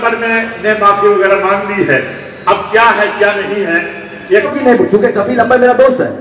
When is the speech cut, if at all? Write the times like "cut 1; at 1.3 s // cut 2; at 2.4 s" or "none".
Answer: cut 1; at 4.5 s